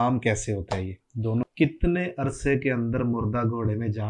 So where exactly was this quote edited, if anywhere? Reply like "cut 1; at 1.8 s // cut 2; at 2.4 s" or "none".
cut 1; at 1.5 s